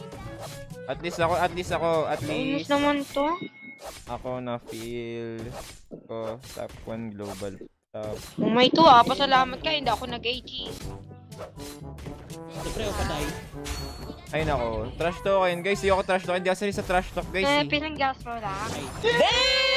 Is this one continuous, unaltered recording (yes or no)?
yes